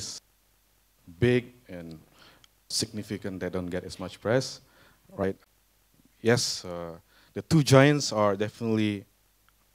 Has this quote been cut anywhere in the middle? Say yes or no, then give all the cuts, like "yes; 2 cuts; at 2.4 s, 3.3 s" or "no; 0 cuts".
no; 0 cuts